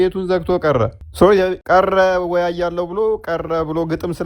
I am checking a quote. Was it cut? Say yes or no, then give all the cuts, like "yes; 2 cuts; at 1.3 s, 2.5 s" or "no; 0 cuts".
yes; 2 cuts; at 1.0 s, 1.6 s